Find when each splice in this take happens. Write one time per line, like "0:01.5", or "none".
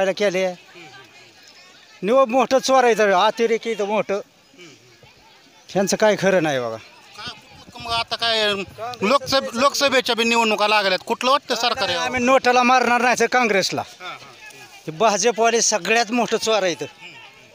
none